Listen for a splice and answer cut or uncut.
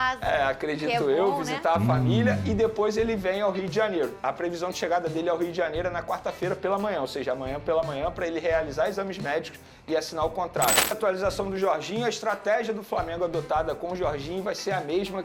cut